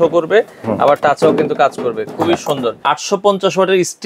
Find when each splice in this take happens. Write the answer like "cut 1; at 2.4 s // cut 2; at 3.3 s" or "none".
cut 1; at 2.8 s